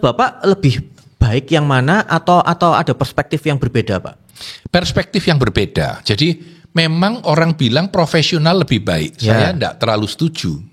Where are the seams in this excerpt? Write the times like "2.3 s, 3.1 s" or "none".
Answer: none